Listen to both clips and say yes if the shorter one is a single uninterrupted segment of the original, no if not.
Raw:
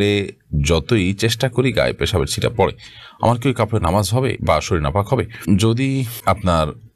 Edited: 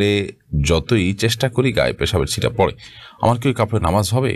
yes